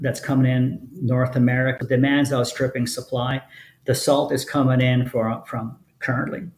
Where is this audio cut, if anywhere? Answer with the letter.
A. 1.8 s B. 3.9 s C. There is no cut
A